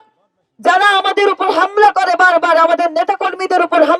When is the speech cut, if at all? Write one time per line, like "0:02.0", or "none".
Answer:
none